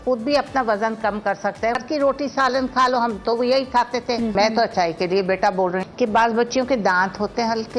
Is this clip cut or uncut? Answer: cut